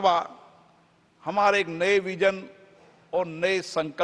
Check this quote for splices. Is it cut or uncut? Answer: uncut